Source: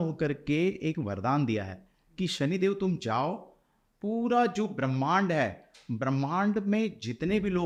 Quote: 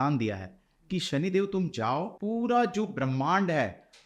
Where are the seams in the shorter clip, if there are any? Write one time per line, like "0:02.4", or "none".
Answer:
0:02.1